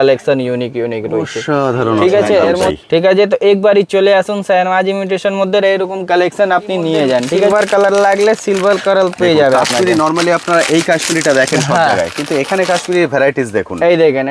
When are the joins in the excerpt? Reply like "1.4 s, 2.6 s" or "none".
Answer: 2.7 s, 7.5 s